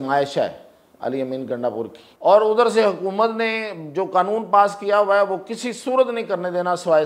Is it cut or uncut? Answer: cut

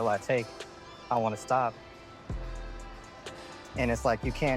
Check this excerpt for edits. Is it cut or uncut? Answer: uncut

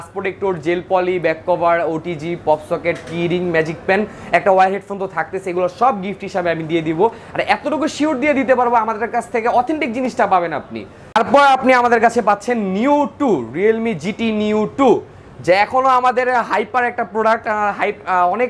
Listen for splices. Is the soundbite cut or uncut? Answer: uncut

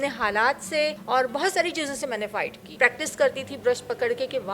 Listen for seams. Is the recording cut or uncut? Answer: cut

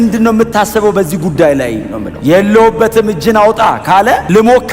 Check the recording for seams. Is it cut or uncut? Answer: uncut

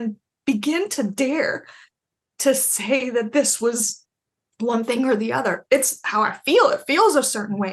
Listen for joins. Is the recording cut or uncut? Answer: uncut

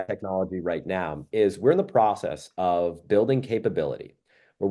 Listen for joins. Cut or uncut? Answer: uncut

